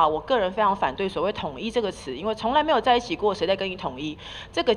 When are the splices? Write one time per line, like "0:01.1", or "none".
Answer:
none